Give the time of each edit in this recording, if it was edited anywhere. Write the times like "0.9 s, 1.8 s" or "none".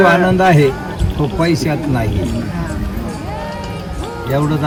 none